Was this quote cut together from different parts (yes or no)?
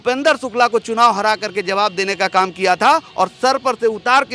no